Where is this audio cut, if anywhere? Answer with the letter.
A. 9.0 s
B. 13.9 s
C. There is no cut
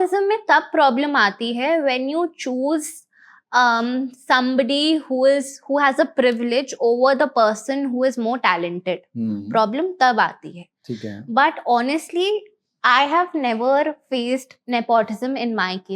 C